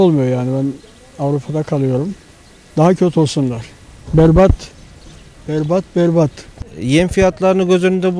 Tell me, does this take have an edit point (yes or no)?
no